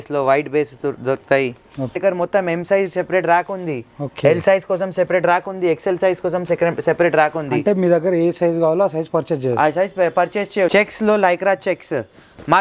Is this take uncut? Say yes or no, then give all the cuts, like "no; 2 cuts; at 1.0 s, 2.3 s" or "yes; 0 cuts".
no; 2 cuts; at 1.9 s, 10.7 s